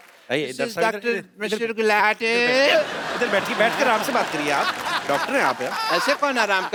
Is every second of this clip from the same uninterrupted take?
yes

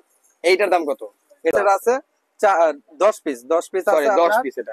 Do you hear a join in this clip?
yes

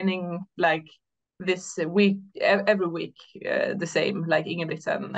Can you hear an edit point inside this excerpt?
no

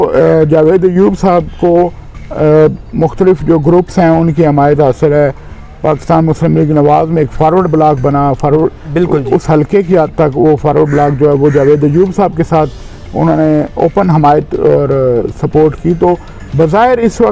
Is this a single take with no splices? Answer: yes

